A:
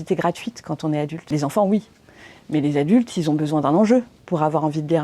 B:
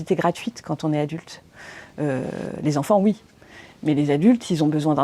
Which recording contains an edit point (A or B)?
A